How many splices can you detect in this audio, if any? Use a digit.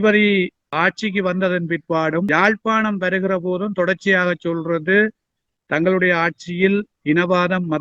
1